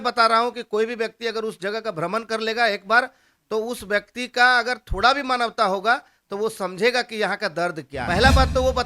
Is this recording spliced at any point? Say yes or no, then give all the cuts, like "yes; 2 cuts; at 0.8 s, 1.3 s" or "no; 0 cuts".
yes; 1 cut; at 7.9 s